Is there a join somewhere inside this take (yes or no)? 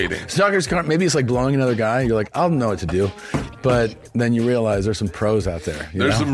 no